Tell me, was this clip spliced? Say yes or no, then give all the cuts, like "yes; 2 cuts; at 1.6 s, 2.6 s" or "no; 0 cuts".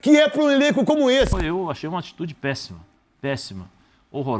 yes; 1 cut; at 1.4 s